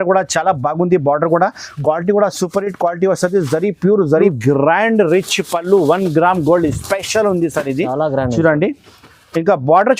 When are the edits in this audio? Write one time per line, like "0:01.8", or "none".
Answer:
0:04.3